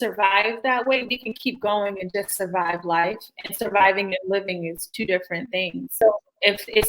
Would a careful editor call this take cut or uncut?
cut